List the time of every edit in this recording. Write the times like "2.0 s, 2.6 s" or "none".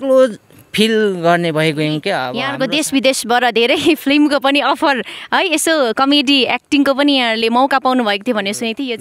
2.4 s